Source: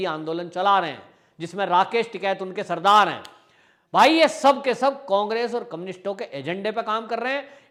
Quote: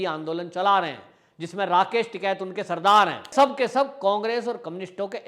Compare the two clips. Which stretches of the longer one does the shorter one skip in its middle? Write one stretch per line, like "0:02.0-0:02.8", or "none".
0:03.3-0:04.4